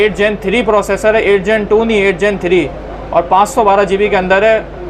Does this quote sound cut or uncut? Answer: uncut